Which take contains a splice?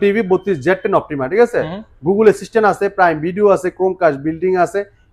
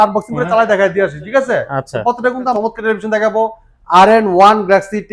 second; 1 cut; at 2.5 s

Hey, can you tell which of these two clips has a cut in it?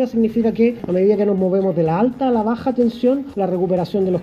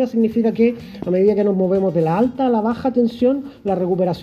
first; 2 cuts; at 0.8 s, 3.3 s

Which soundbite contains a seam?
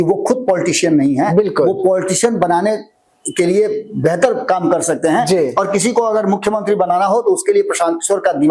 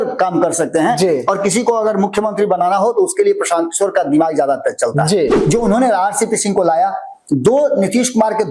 second; 1 cut; at 5.4 s

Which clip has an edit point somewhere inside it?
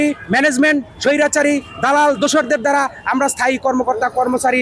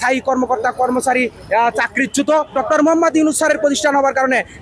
second; 1 cut; at 2.5 s

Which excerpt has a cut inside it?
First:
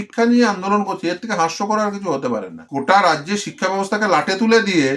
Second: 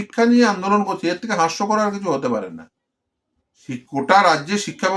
first; 1 cut; at 2.6 s

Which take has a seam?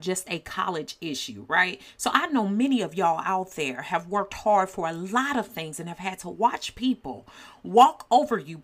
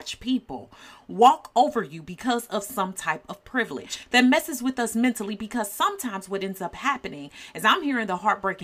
second; 1 cut; at 4.0 s

